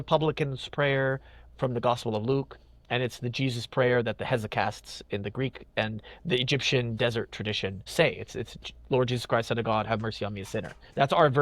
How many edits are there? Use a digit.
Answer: 1